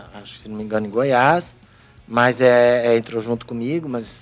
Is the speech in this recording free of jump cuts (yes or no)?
yes